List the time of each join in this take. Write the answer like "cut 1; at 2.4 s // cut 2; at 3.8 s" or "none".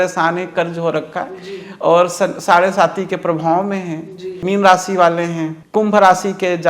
cut 1; at 4.4 s // cut 2; at 5.6 s